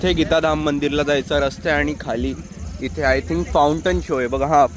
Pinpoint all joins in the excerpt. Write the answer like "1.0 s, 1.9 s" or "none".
none